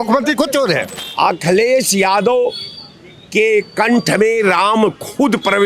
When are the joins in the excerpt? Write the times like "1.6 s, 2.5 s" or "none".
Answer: 1.0 s